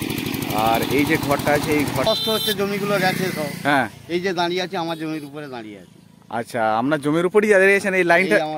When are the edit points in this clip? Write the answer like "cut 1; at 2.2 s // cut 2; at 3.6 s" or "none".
cut 1; at 2.0 s